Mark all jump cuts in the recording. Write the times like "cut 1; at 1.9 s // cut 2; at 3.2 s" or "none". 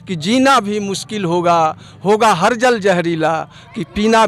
none